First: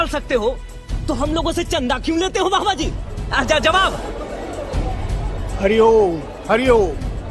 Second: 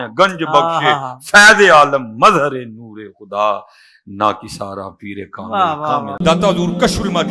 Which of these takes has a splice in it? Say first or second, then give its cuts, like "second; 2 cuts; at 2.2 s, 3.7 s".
second; 1 cut; at 6.1 s